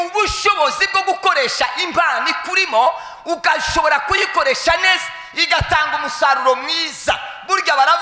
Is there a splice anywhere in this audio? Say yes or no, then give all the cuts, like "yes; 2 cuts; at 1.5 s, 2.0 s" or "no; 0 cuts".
no; 0 cuts